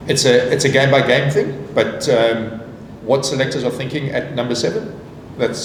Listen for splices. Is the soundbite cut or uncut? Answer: uncut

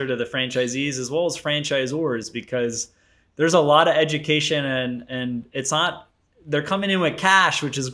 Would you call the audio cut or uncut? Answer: uncut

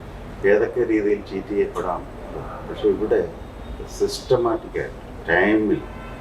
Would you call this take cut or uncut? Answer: uncut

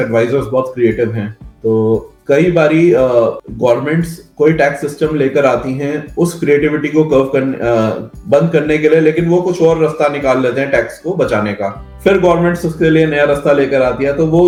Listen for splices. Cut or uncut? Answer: uncut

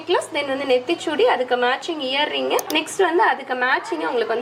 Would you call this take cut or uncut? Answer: uncut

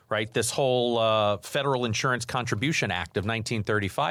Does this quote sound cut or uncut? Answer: uncut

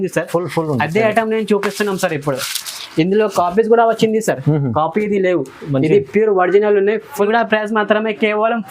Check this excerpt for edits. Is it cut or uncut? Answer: cut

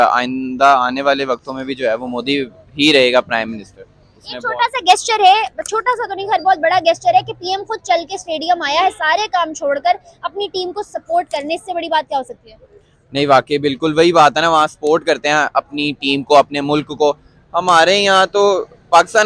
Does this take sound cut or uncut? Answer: uncut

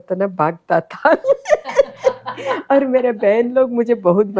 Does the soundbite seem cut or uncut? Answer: uncut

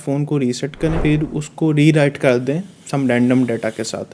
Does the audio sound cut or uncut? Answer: cut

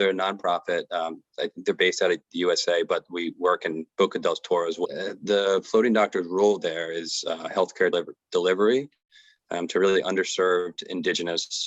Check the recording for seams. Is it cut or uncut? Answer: cut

